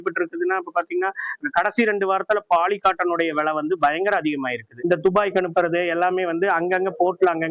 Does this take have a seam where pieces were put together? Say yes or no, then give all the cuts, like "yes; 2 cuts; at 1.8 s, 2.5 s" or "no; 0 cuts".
yes; 1 cut; at 4.7 s